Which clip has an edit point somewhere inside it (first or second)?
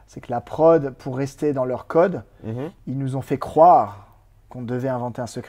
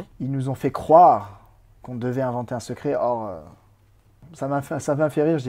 second